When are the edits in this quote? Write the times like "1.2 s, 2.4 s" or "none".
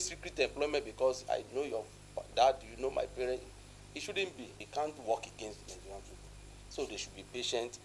4.6 s

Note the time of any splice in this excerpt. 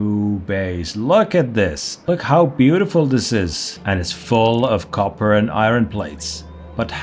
1.9 s, 3.8 s

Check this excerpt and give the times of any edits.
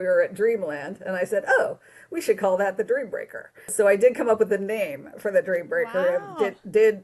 3.7 s

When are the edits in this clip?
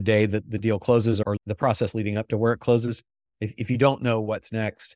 1.4 s

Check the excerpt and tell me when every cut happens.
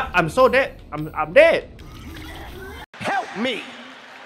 1.8 s

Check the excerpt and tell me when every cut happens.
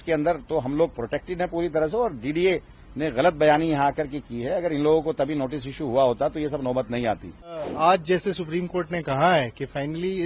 7.6 s

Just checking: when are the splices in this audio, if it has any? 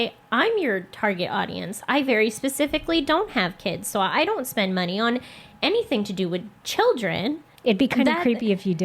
7.5 s

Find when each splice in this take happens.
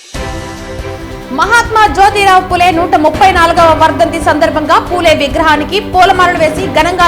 0.9 s

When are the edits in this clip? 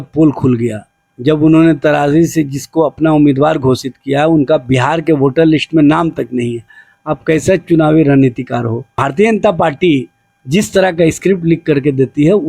9.0 s

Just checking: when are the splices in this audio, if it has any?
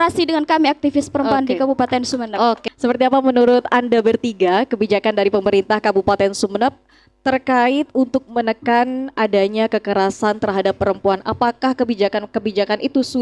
2.6 s

